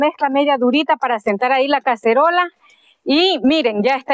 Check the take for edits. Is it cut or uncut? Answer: uncut